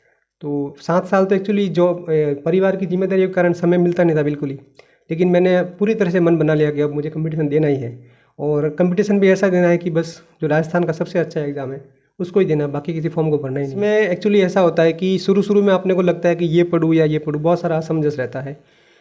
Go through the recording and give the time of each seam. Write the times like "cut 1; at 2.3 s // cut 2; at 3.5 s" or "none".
cut 1; at 13.7 s